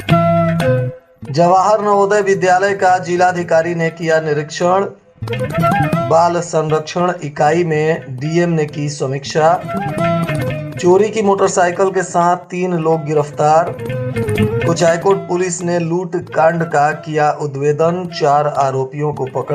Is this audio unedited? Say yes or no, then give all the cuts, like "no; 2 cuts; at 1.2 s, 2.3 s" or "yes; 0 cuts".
no; 1 cut; at 1.0 s